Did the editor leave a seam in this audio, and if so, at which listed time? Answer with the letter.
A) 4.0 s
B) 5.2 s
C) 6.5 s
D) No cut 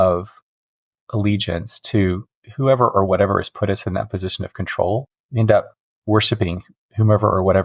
B